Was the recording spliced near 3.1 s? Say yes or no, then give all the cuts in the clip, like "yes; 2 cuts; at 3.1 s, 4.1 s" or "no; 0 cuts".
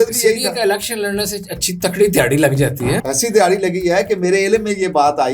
yes; 1 cut; at 3.1 s